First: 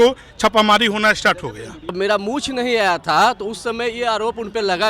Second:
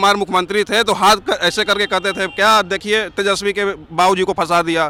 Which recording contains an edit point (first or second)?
first